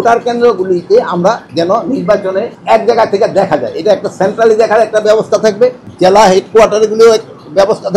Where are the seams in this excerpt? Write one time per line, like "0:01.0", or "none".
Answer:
0:01.5
0:02.6
0:05.8